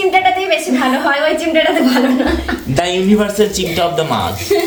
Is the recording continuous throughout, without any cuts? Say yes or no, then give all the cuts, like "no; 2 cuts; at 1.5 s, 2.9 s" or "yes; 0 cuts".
yes; 0 cuts